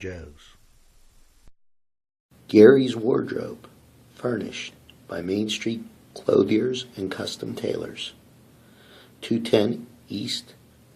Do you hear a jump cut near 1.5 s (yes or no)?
yes